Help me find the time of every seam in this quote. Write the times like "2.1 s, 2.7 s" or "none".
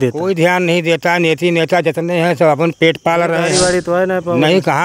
3.5 s